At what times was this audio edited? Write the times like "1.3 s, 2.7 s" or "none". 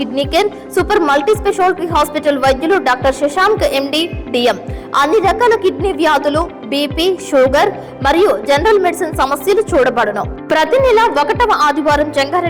none